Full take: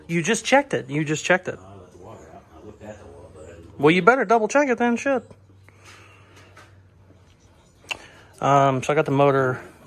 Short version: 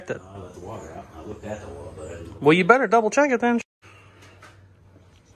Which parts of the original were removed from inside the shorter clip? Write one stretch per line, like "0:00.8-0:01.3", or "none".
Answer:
0:05.0-0:05.8